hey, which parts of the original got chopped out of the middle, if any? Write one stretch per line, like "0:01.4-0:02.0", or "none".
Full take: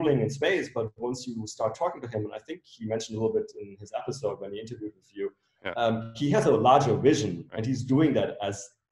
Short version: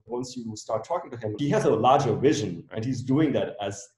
0:02.3-0:06.2